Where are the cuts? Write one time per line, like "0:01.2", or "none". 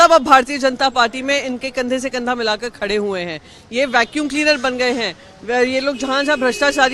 none